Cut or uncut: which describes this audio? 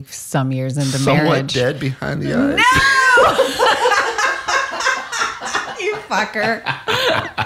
uncut